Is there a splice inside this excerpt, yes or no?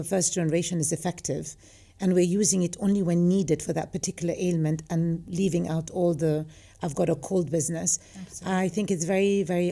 no